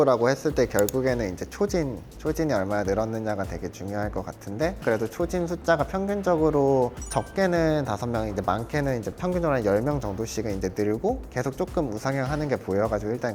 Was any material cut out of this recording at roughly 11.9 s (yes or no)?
no